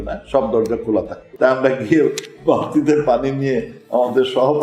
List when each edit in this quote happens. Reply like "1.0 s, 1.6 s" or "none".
1.2 s